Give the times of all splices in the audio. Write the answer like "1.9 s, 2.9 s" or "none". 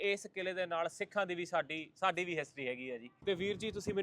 3.1 s